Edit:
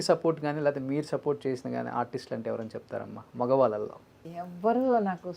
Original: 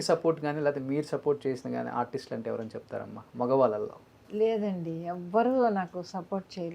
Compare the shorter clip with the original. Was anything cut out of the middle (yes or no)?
yes